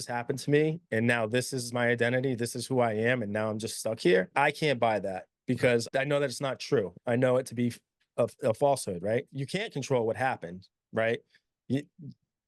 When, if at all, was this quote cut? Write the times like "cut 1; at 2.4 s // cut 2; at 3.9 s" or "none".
cut 1; at 4.3 s // cut 2; at 5.9 s // cut 3; at 9.4 s